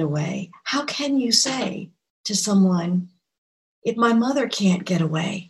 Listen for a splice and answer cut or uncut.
uncut